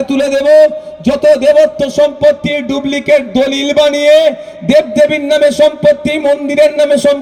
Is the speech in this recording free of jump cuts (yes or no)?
yes